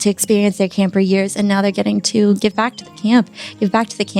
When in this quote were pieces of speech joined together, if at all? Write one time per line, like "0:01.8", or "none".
0:02.4